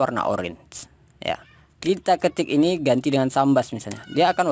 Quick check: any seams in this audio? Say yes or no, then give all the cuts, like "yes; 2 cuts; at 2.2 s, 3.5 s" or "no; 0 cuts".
no; 0 cuts